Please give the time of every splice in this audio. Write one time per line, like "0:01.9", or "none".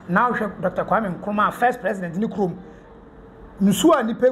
none